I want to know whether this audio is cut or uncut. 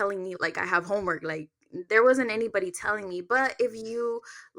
uncut